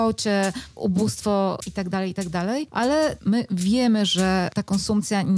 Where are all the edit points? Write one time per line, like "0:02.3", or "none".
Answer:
0:01.7
0:03.1
0:04.6